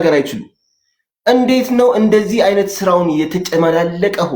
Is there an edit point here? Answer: no; 0 cuts

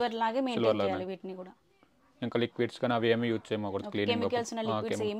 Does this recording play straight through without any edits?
yes; 0 cuts

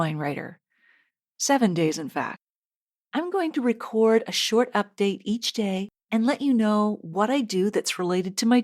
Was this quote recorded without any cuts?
no; 1 cut; at 5.9 s

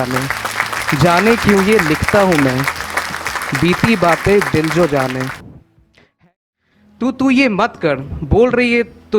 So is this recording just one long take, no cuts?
no; 1 cut; at 6.0 s

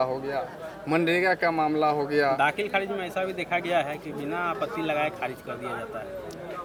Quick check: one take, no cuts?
yes; 0 cuts

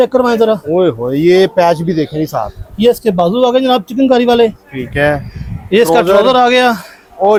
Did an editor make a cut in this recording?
no; 0 cuts

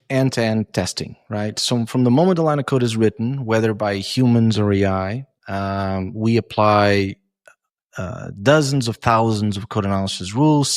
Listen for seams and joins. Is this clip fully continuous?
yes; 0 cuts

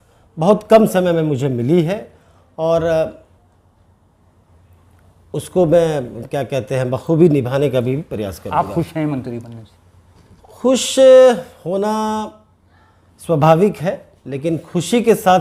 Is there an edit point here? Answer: no; 0 cuts

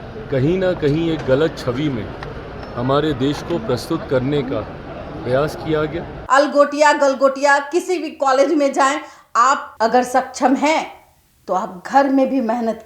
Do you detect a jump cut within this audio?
yes; 2 cuts; at 6.1 s, 9.7 s

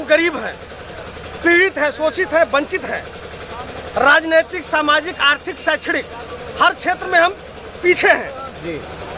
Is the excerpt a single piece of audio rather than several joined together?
yes; 0 cuts

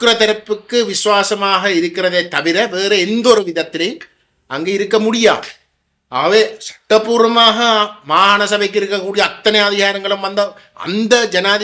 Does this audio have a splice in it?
no; 0 cuts

